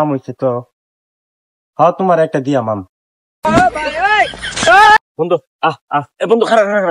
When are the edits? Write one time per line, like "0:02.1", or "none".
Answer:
0:05.0